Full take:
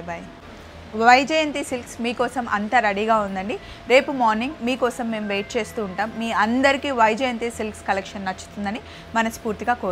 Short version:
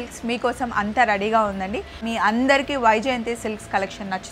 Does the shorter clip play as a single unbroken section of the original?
no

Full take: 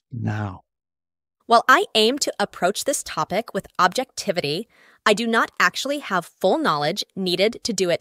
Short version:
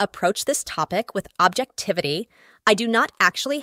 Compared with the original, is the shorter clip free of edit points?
yes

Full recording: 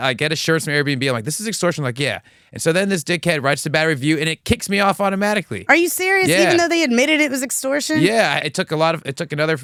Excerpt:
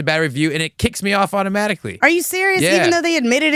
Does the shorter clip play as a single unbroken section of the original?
yes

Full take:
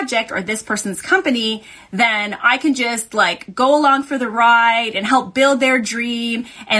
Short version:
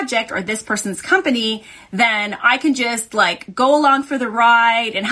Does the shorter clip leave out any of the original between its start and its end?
no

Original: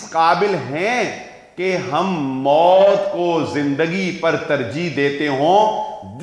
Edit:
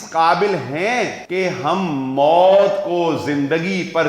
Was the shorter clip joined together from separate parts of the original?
yes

